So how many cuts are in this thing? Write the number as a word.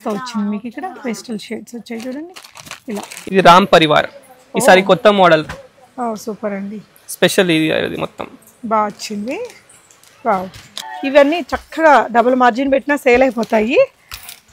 two